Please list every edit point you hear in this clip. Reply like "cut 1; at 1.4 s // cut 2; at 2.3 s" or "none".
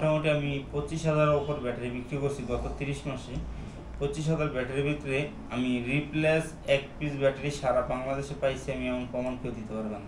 none